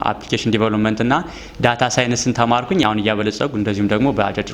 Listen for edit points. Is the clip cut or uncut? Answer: cut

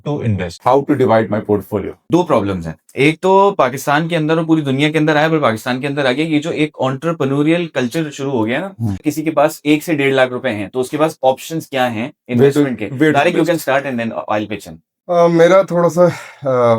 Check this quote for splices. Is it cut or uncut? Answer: cut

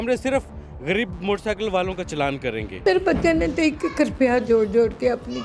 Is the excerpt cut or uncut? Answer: cut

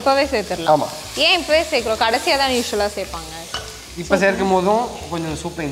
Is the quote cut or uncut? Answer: cut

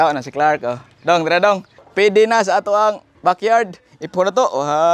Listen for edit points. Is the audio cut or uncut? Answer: cut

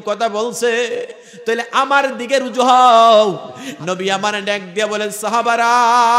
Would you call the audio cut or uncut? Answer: cut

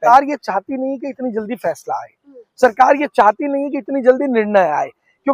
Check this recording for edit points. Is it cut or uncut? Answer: uncut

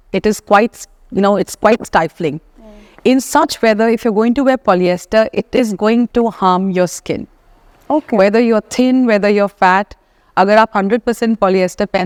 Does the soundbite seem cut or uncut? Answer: uncut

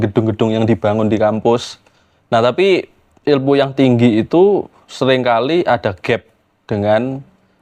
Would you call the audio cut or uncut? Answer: uncut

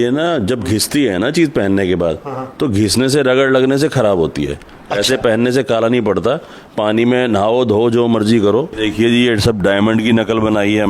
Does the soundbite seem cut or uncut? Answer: cut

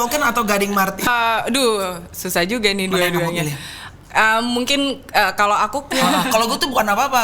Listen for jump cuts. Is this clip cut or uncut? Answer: cut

